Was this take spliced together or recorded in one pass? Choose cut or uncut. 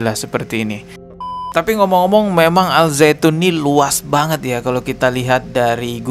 cut